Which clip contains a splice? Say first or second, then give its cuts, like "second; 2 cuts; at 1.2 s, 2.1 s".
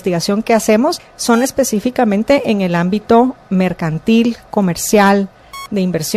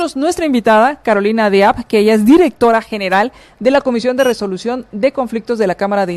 first; 1 cut; at 1.1 s